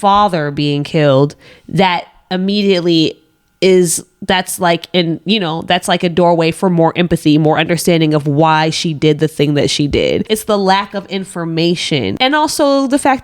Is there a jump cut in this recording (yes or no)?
no